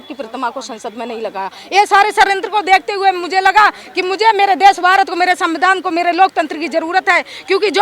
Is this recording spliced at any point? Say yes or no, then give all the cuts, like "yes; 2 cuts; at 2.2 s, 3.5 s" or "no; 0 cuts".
no; 0 cuts